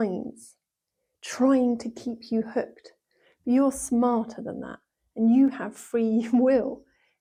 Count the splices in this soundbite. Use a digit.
0